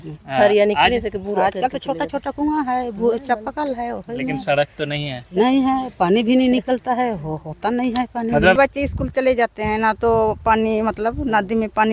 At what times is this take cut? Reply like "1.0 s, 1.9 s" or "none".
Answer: 8.6 s